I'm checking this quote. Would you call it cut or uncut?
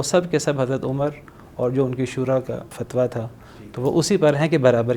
cut